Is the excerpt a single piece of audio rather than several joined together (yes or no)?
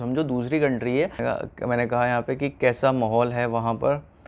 no